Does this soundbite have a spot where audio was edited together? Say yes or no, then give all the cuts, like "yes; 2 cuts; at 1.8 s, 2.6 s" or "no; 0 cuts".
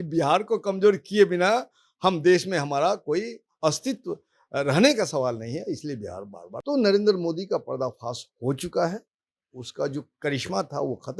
yes; 1 cut; at 6.4 s